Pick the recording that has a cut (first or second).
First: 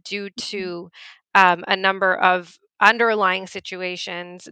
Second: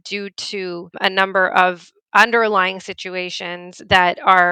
second